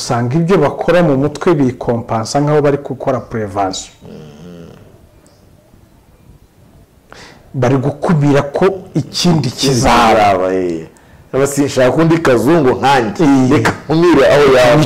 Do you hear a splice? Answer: no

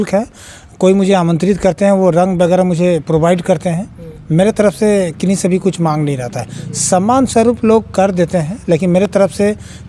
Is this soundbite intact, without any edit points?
yes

